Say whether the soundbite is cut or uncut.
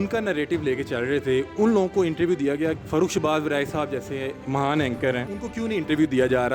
cut